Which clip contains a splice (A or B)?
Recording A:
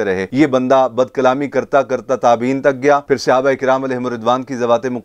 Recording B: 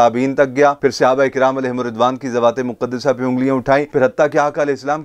B